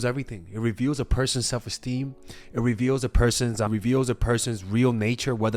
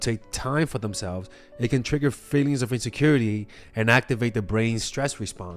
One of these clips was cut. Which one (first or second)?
first